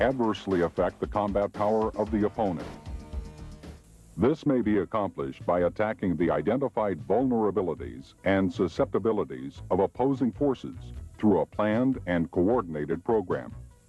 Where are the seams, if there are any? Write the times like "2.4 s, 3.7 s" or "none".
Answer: 2.2 s